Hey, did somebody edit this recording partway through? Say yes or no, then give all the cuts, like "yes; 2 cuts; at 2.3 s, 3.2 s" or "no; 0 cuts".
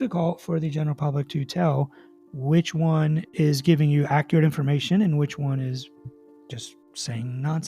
no; 0 cuts